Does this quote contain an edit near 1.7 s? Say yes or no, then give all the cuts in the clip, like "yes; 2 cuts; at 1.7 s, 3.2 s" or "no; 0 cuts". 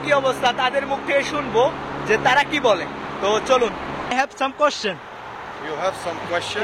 no; 1 cut; at 4.0 s